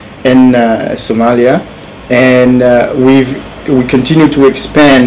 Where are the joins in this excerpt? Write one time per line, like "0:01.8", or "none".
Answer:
0:03.4